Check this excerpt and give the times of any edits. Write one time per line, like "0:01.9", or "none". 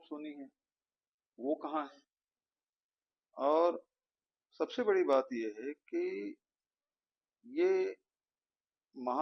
none